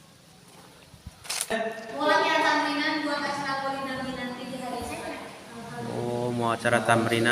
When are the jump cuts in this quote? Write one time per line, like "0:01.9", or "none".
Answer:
0:01.5